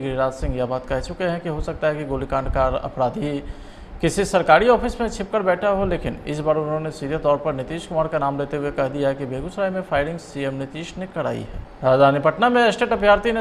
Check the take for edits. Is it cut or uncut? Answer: cut